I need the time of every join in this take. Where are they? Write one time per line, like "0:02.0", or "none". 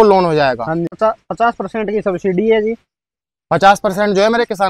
0:00.9